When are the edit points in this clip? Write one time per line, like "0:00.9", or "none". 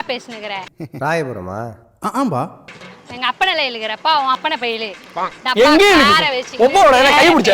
none

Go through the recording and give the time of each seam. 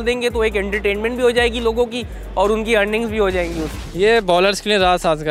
0:03.6

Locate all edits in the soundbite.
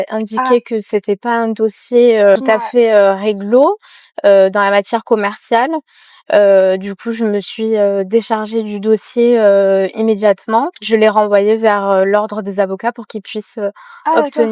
none

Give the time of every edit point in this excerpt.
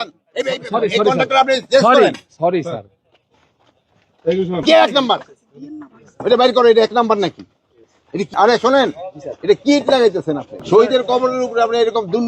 0:04.6
0:08.3
0:10.5

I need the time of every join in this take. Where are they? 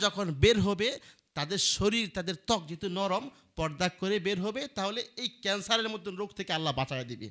none

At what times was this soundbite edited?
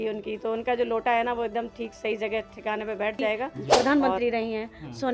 0:03.6

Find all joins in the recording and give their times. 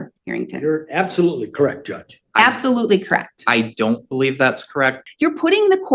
0:05.0

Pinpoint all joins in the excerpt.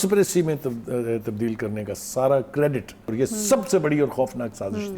0:03.1

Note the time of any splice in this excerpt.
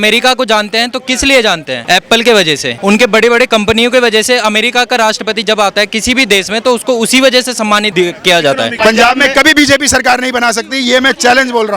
0:01.7
0:02.7
0:07.9
0:08.7

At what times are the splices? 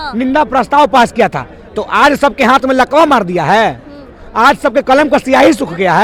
none

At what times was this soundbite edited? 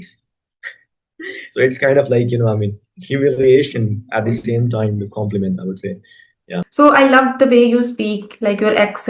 0:06.7

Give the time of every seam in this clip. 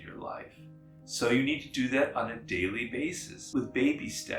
0:03.3

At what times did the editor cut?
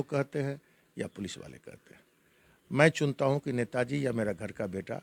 none

